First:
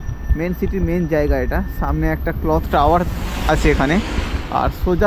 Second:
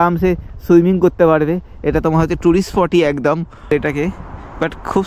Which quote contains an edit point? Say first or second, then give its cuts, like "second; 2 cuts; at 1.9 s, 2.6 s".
second; 1 cut; at 3.7 s